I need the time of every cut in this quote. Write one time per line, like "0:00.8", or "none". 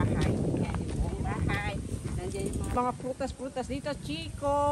0:02.8